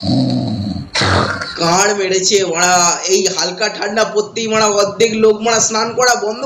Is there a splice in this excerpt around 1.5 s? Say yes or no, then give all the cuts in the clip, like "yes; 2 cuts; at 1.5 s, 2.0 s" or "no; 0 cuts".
yes; 1 cut; at 1.5 s